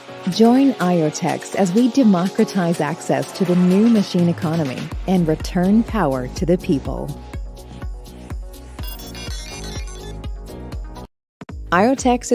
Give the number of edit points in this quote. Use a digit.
1